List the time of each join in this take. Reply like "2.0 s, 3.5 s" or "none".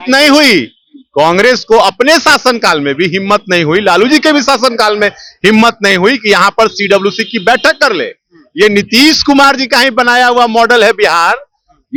none